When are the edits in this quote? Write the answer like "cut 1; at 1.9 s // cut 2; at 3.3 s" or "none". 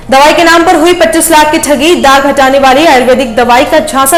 none